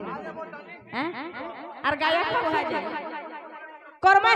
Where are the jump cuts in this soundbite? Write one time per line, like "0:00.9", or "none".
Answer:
0:02.5